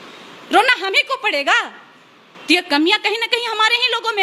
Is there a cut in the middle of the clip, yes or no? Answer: no